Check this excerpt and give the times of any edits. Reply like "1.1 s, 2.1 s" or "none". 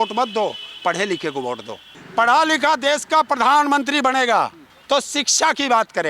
2.0 s, 4.7 s